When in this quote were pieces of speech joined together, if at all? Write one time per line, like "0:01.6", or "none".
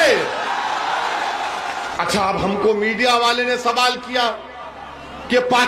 0:01.9